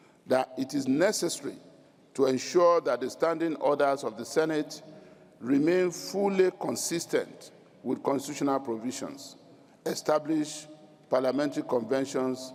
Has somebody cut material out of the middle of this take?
no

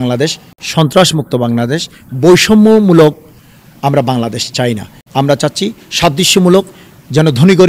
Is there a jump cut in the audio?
no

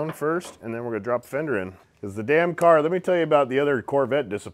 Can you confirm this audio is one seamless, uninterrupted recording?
no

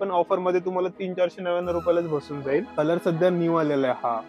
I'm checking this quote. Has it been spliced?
yes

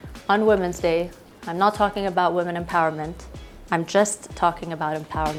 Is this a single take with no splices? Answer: yes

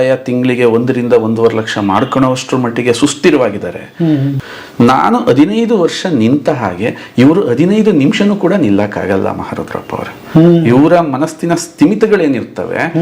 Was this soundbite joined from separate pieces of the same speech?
yes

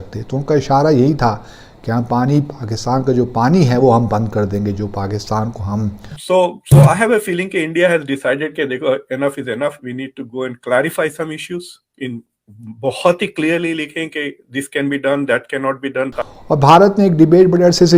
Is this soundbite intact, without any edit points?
no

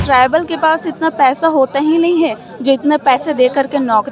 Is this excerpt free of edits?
yes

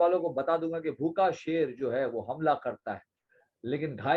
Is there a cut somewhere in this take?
no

